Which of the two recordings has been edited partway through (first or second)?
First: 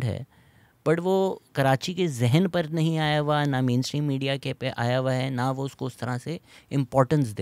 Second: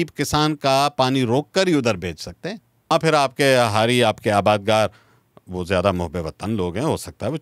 second